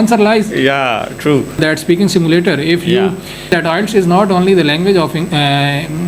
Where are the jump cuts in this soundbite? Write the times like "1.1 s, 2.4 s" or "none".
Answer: 1.6 s, 3.5 s